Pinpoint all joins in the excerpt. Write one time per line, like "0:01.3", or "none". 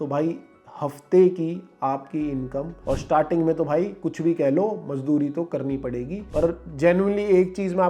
0:02.8
0:06.2